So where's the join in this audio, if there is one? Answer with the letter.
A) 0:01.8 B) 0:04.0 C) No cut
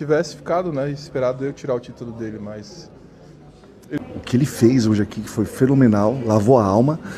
B